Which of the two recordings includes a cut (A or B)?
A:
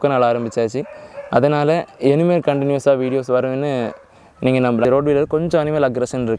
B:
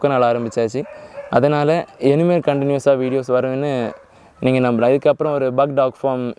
A